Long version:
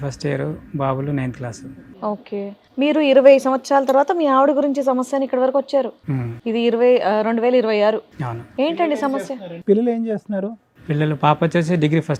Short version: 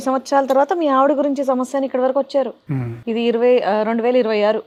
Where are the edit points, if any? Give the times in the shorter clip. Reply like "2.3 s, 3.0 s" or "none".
none

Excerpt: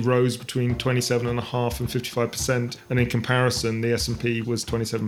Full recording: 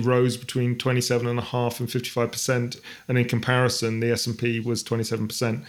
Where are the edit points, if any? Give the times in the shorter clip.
2.8 s

